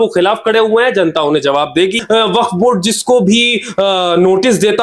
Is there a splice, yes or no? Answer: yes